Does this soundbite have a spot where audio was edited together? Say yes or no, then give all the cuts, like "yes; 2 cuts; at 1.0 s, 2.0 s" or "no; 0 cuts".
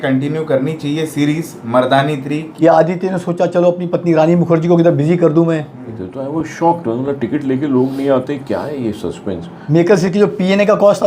yes; 3 cuts; at 2.5 s, 5.9 s, 9.5 s